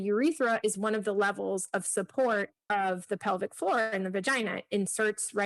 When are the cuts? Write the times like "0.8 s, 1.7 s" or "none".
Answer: 2.6 s